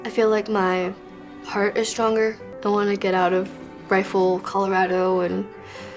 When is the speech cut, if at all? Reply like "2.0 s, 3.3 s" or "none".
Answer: 2.5 s